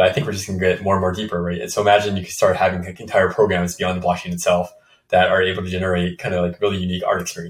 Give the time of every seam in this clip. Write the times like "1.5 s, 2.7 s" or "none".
none

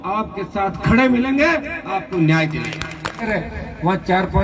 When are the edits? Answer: 3.2 s

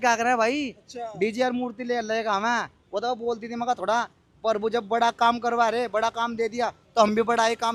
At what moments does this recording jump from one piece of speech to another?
none

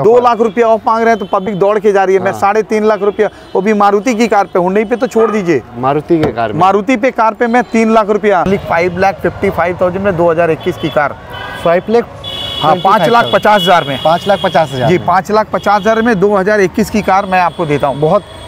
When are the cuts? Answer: 8.5 s

